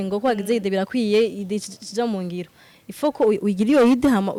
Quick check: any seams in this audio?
no; 0 cuts

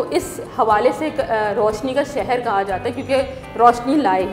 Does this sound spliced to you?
no; 0 cuts

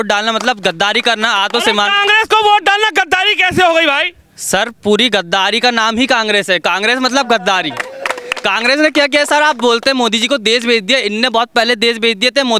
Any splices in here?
no; 0 cuts

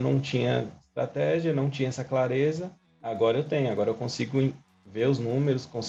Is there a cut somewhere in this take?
no; 0 cuts

